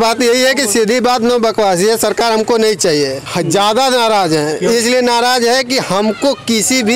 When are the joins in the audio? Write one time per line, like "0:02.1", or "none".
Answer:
none